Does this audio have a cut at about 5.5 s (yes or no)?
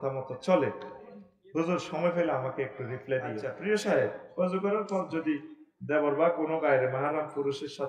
no